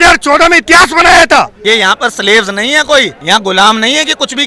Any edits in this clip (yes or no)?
yes